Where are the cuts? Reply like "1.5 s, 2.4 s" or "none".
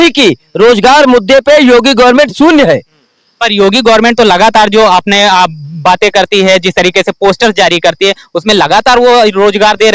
none